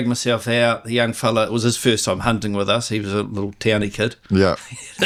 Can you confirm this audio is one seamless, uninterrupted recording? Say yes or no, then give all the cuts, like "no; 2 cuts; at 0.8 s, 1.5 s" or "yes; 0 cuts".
yes; 0 cuts